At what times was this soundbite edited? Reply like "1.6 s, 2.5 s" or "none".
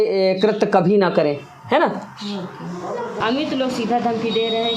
3.2 s